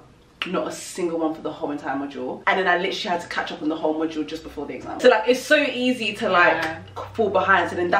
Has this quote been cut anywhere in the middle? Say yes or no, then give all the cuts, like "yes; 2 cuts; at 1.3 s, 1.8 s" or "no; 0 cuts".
no; 0 cuts